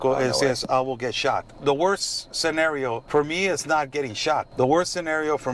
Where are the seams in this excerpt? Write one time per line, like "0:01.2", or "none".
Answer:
0:01.5
0:03.0
0:04.5